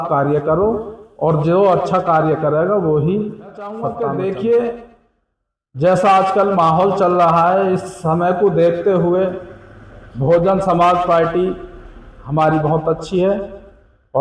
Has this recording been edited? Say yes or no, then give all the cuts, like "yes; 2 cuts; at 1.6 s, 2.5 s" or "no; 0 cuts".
yes; 1 cut; at 3.8 s